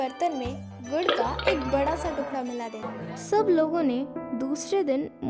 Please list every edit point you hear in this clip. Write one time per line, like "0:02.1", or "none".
0:02.8